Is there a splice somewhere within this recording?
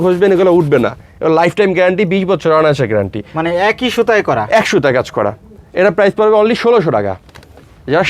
no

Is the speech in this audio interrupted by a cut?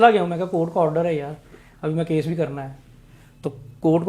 no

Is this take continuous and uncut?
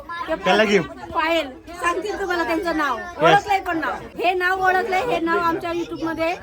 no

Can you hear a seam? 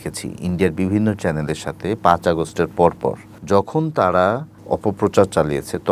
yes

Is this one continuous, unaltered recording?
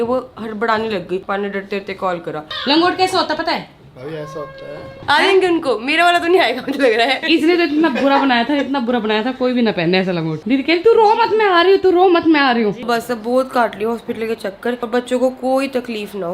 no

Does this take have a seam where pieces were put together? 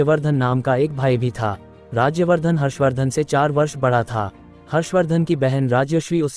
yes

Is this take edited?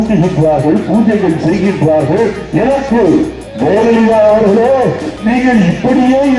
yes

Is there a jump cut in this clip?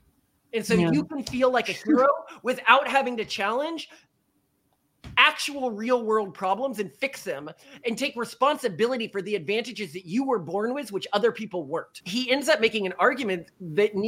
yes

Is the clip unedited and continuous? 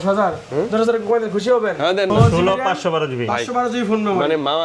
no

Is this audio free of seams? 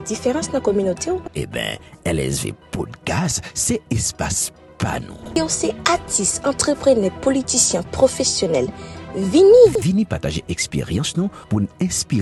yes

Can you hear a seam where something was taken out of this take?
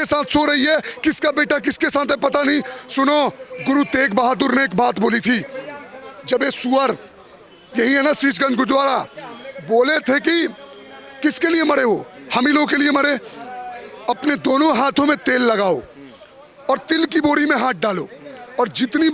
no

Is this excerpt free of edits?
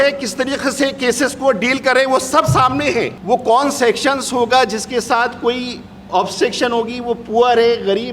no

